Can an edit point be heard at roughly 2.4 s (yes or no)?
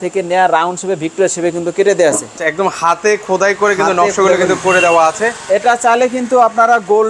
yes